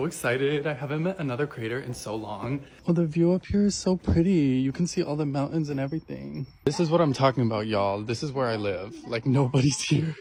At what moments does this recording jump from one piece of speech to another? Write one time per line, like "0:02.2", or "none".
none

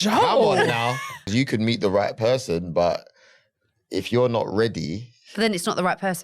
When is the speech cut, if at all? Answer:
0:01.3

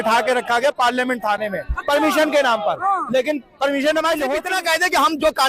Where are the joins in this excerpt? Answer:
0:04.4

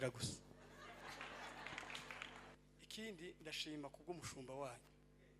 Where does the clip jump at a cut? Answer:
0:02.6

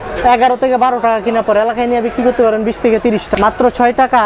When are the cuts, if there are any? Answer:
0:03.3

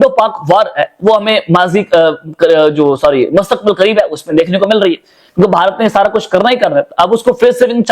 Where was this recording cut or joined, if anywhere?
none

